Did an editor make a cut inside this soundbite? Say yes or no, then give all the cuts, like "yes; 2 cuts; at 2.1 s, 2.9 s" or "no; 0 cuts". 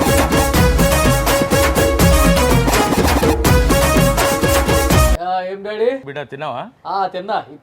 yes; 2 cuts; at 5.1 s, 6.1 s